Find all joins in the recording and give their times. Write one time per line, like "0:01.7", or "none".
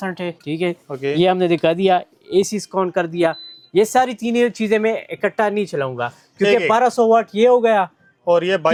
none